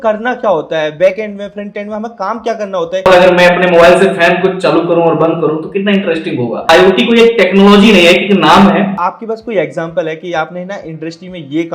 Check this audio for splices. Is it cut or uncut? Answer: cut